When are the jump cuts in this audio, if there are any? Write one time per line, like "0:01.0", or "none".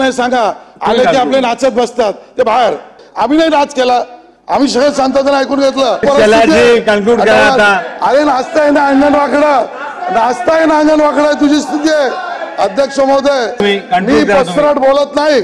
0:03.0
0:06.0
0:13.6